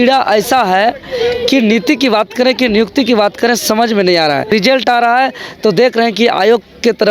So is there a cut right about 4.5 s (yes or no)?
yes